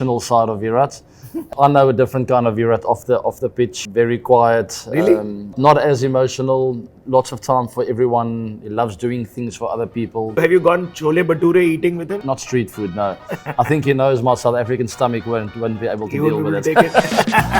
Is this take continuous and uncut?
no; 4 cuts; at 1.5 s, 3.8 s, 10.3 s, 12.2 s

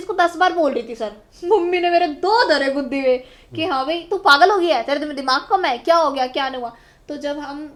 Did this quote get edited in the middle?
no; 0 cuts

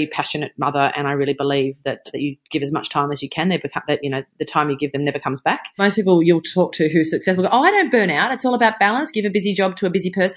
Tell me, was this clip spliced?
yes; 2 cuts; at 2.0 s, 5.8 s

